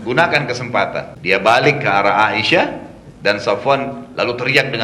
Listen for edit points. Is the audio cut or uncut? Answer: cut